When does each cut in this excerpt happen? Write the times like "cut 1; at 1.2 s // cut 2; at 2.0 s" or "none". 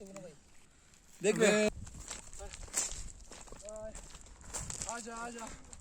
cut 1; at 1.7 s